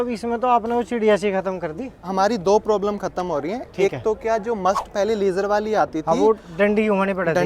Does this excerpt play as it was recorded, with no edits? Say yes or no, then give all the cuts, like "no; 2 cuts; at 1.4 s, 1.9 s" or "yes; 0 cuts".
yes; 0 cuts